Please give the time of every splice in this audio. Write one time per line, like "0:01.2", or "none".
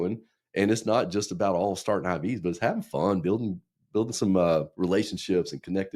none